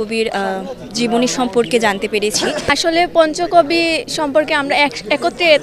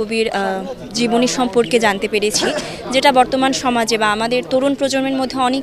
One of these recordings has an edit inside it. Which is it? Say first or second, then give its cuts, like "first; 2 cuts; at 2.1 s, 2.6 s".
first; 1 cut; at 2.7 s